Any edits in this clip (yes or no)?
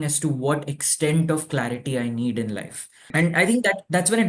yes